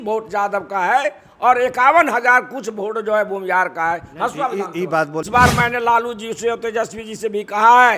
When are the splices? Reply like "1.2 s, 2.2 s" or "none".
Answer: 5.3 s